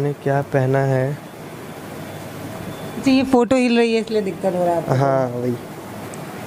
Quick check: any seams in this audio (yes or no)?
no